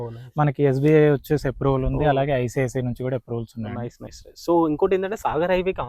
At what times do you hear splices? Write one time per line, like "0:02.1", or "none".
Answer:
0:04.0